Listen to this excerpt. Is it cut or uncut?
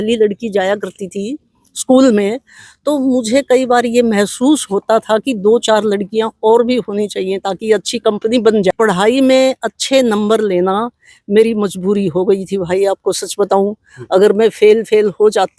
cut